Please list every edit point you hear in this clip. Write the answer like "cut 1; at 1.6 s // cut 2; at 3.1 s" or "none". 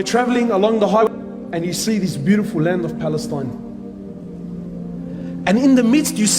cut 1; at 1.0 s